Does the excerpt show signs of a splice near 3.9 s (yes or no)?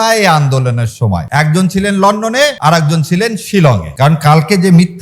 yes